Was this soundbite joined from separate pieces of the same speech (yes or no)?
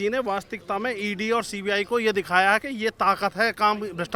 no